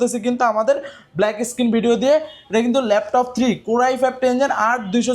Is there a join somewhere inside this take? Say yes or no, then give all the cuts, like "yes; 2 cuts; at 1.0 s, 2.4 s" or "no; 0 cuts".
no; 0 cuts